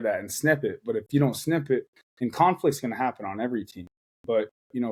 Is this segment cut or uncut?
uncut